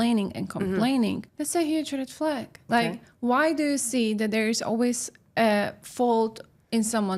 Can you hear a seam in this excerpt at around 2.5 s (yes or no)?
yes